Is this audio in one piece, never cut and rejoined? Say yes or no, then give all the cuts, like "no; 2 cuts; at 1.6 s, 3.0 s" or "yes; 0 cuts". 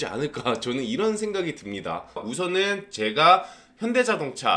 no; 1 cut; at 2.2 s